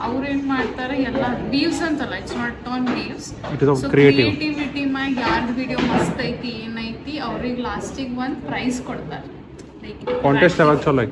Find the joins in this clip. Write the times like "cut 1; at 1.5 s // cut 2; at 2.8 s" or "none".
none